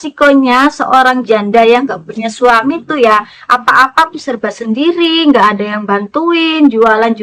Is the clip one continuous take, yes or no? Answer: yes